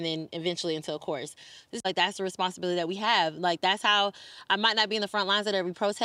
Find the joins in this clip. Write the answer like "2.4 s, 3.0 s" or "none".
1.8 s